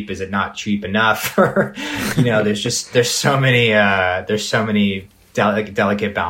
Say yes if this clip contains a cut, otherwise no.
no